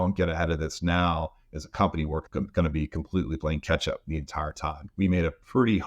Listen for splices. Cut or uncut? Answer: cut